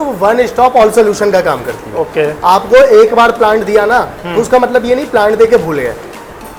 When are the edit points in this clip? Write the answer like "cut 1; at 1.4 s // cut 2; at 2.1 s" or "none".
none